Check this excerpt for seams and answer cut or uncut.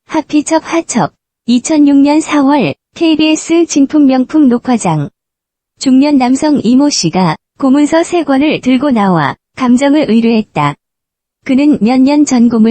cut